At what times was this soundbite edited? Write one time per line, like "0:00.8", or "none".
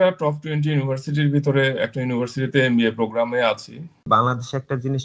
0:04.0